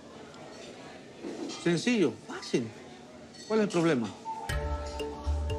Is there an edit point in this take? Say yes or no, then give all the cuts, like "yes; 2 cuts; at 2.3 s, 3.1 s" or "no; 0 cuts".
no; 0 cuts